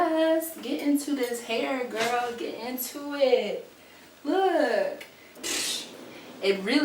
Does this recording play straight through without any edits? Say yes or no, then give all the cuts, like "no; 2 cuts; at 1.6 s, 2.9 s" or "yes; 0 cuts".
no; 1 cut; at 5.5 s